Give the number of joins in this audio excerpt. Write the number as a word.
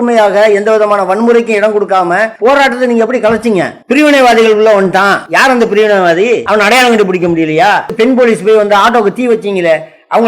five